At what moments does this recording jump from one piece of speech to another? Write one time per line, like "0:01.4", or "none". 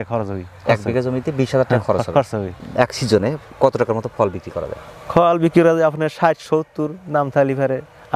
none